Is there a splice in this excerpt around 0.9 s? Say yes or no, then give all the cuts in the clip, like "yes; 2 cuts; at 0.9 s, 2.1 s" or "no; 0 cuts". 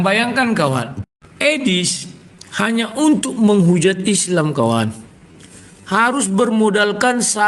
yes; 1 cut; at 0.9 s